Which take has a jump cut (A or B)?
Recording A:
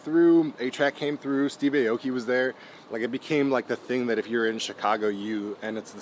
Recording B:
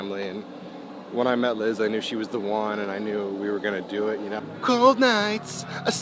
B